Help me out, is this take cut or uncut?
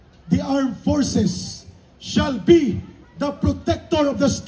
uncut